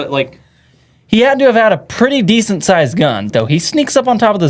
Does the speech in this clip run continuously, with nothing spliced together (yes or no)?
no